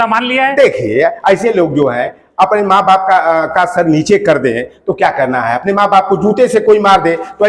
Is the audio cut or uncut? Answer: uncut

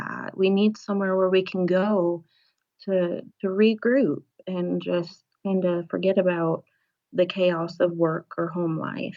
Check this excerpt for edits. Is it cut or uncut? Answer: uncut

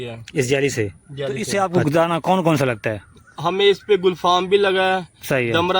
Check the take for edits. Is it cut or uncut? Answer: cut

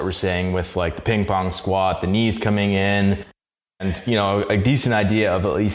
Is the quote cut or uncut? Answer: cut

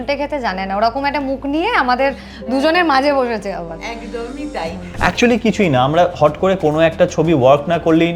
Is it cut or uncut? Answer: cut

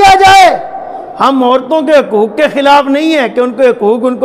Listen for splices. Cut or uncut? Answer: uncut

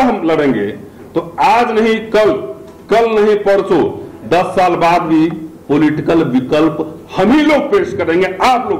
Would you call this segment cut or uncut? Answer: uncut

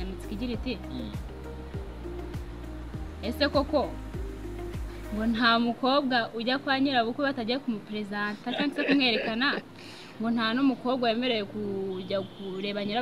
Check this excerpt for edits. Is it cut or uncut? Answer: uncut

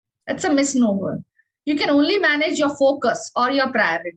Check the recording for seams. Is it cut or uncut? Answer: uncut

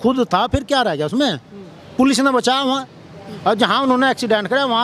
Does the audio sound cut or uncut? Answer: uncut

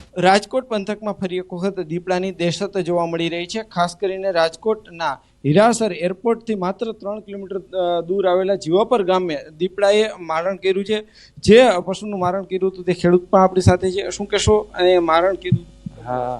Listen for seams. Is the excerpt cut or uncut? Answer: cut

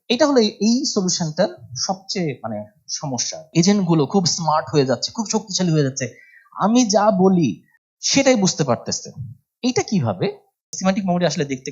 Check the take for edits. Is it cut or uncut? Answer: cut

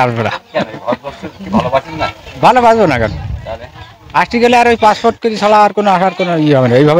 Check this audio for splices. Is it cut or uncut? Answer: uncut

